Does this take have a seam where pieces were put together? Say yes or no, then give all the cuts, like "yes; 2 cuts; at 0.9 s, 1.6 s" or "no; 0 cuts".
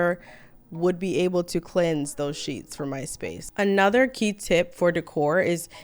yes; 1 cut; at 3.4 s